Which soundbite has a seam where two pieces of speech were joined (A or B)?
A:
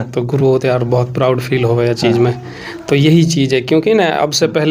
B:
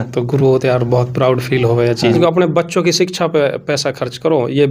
B